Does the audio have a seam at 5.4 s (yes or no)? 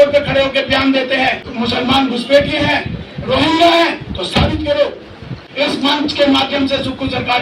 yes